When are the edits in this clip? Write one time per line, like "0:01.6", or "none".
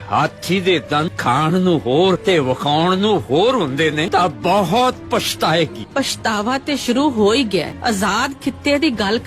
0:01.1
0:02.2
0:04.0
0:05.8
0:07.7

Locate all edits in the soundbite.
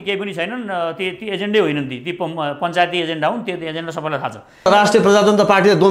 0:04.7

